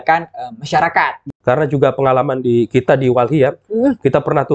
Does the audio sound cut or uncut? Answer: cut